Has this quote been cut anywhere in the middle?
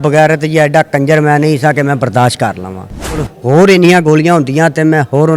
yes; 1 cut; at 3.2 s

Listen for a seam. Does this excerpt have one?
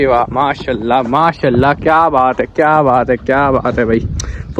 no; 0 cuts

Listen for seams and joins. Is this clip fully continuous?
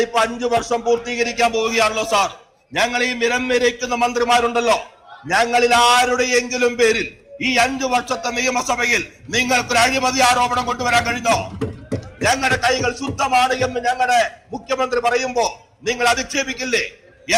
yes; 0 cuts

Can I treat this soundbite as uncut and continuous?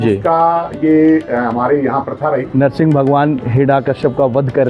no; 1 cut; at 2.4 s

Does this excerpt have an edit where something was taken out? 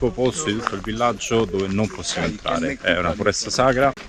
no; 0 cuts

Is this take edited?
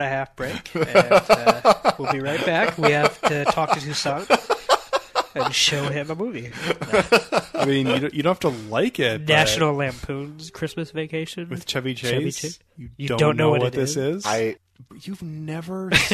yes; 1 cut; at 14.6 s

